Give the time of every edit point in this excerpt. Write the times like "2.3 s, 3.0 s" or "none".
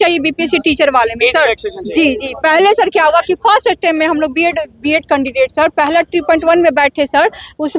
none